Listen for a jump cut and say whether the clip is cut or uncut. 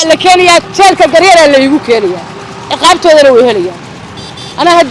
uncut